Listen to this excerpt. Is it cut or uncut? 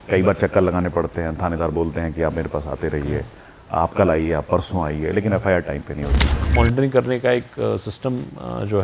cut